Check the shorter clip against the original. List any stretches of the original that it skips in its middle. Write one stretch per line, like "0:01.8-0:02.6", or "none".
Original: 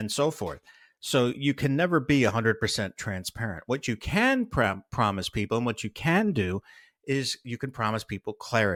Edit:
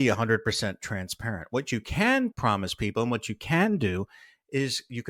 0:04.5-0:04.9

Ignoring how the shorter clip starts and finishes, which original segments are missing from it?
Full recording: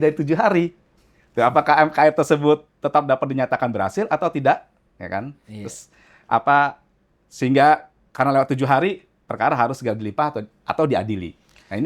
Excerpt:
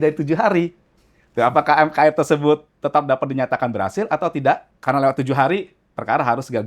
0:04.7-0:08.0

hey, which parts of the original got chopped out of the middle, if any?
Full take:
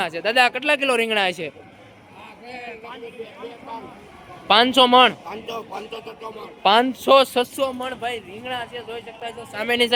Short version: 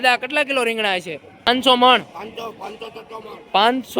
0:01.8-0:04.6

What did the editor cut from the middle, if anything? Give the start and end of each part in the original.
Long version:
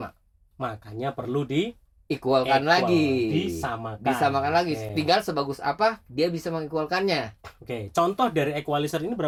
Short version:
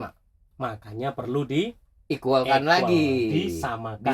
none

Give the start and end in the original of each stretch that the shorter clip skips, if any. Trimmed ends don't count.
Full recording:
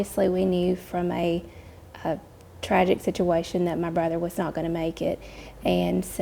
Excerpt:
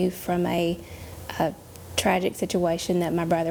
none

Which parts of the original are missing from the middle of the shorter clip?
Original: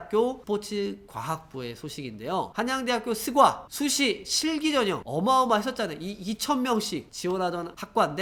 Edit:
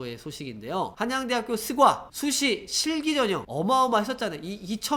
none

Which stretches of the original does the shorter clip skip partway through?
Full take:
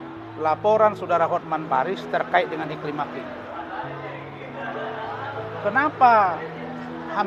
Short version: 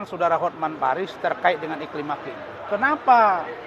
0:03.5-0:05.5

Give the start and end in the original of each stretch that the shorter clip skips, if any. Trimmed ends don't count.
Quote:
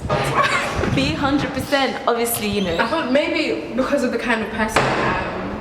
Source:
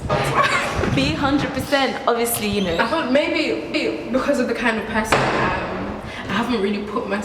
0:03.6-0:03.9

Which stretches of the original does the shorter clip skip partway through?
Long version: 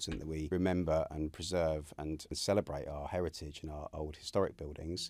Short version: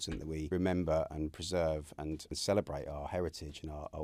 none

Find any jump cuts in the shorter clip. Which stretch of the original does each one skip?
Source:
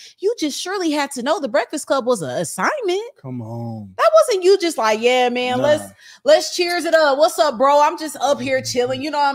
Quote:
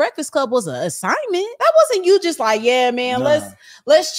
0:03.1-0:03.9

